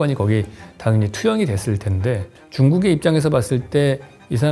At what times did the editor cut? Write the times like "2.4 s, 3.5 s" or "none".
none